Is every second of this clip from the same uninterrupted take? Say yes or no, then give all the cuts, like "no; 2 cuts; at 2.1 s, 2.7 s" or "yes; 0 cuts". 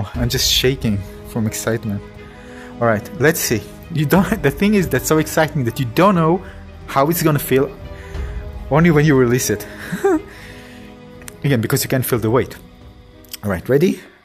yes; 0 cuts